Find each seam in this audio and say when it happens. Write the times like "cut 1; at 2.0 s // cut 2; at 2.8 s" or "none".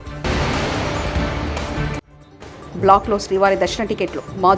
none